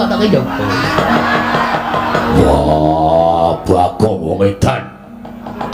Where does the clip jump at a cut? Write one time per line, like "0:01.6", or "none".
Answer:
0:02.3